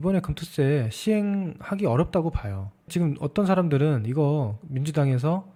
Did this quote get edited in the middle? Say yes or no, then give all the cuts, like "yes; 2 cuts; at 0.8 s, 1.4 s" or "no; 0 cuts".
no; 0 cuts